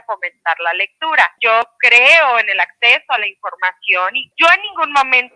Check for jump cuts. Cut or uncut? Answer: cut